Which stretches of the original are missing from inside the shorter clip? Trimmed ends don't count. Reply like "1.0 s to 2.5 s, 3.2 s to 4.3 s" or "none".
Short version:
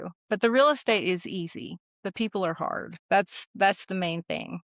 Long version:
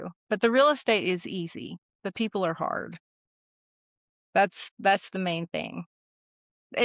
2.9 s to 4.2 s